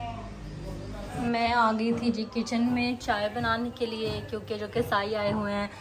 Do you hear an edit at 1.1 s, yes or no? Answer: yes